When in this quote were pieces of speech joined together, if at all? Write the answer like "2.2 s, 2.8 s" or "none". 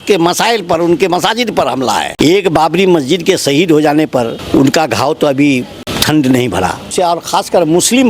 2.1 s, 4.4 s, 5.8 s, 6.9 s